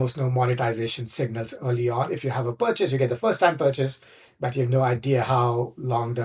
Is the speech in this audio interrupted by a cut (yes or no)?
no